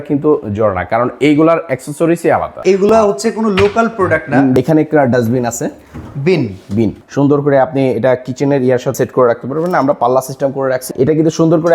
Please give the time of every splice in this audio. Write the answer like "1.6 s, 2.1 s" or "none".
2.6 s, 4.5 s, 7.0 s, 8.9 s, 10.9 s